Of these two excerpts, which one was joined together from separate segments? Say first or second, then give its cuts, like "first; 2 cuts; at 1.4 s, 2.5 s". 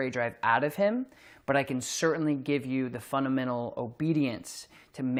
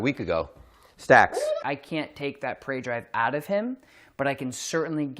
second; 1 cut; at 1.6 s